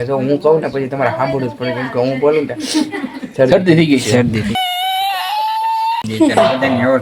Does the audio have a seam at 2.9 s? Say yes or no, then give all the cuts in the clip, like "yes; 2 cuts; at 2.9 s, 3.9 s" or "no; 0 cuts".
no; 0 cuts